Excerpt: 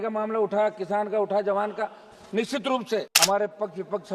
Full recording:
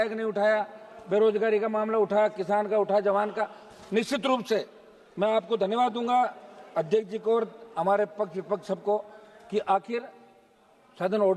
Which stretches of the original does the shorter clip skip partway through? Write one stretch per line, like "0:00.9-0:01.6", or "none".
0:04.7-0:07.7

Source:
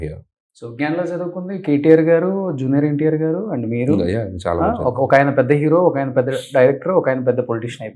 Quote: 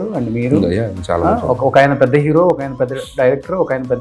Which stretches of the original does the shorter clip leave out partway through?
none

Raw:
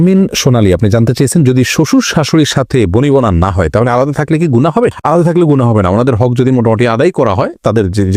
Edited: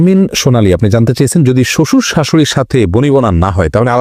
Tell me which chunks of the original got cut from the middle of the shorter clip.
none

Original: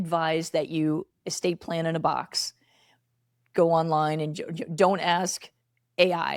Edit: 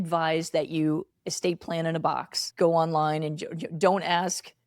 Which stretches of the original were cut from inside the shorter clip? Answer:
0:02.4-0:03.4

